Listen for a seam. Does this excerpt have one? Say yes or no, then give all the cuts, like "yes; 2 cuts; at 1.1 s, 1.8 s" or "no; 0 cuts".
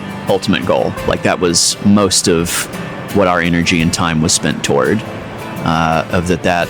no; 0 cuts